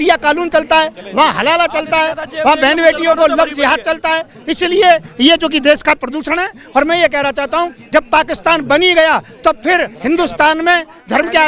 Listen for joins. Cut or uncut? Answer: uncut